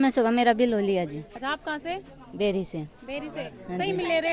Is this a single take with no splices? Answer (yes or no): yes